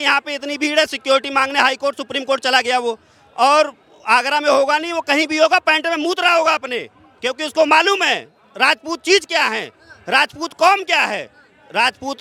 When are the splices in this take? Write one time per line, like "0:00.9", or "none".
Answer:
none